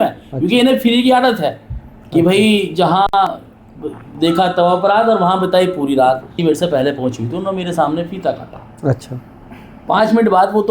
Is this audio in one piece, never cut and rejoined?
no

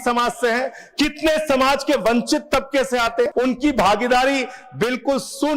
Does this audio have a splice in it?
yes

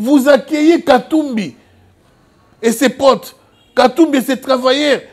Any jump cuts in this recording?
no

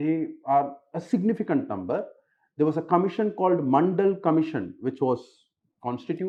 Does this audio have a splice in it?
no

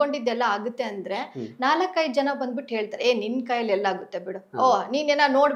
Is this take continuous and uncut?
yes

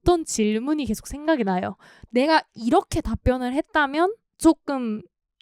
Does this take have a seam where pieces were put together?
no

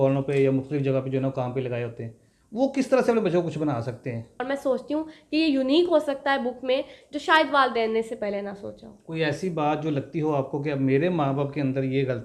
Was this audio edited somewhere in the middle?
yes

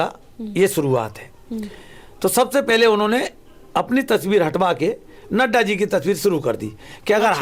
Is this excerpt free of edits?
yes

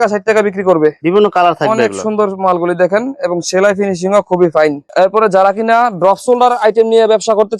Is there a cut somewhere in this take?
no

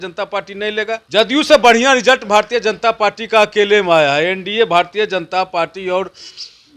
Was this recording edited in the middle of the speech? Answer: yes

